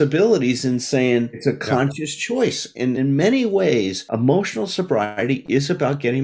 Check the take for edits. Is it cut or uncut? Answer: cut